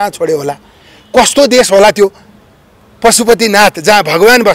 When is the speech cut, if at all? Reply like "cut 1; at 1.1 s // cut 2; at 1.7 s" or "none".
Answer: none